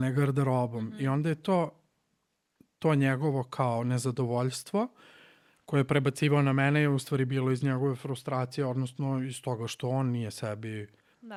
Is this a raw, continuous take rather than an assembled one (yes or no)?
yes